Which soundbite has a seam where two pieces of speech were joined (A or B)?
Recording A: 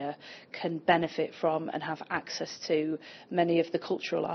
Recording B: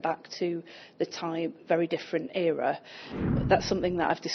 B